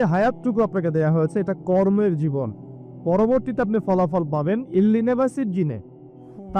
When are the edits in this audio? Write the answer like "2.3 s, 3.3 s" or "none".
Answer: none